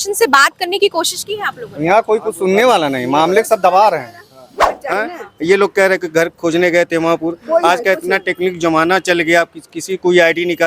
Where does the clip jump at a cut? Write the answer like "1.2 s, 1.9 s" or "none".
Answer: 4.6 s

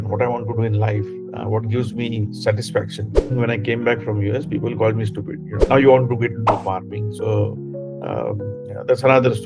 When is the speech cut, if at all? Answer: 3.3 s, 5.5 s

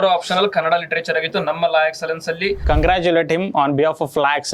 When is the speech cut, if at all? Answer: 2.6 s

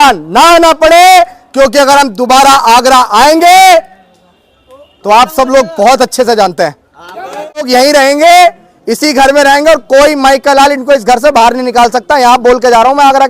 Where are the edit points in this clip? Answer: 7.7 s

